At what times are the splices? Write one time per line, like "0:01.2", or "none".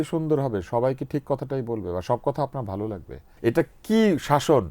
0:03.2